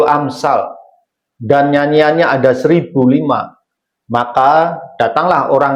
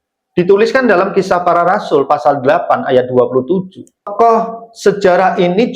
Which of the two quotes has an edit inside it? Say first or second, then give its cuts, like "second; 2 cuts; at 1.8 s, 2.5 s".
second; 1 cut; at 4.1 s